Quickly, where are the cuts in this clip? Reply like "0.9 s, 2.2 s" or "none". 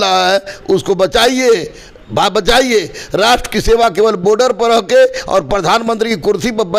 none